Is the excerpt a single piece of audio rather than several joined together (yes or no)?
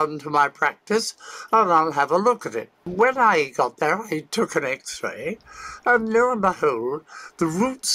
no